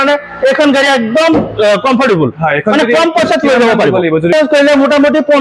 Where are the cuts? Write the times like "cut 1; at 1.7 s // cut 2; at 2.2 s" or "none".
cut 1; at 4.3 s